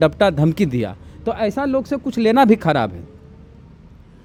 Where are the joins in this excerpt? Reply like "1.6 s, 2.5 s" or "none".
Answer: none